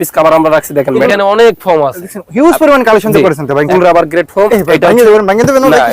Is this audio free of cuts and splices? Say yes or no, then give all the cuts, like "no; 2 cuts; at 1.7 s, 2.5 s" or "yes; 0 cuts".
no; 2 cuts; at 1.1 s, 3.7 s